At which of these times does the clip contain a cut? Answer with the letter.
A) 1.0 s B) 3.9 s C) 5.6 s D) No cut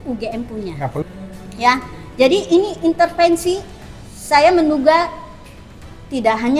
A